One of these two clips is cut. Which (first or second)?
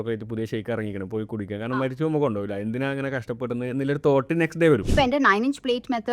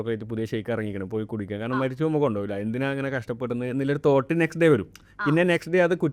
first